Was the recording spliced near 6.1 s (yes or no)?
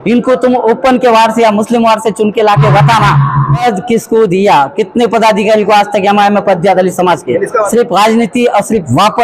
no